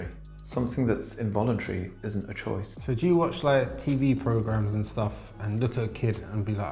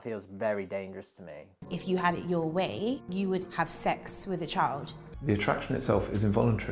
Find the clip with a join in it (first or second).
second